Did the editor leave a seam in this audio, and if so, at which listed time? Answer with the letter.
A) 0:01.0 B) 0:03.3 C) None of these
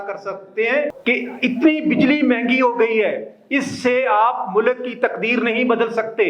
A